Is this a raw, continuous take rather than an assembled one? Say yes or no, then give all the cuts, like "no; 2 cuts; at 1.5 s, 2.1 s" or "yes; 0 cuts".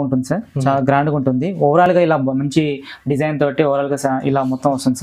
yes; 0 cuts